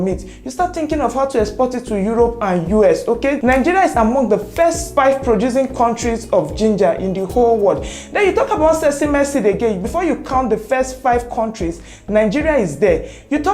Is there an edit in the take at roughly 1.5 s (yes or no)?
no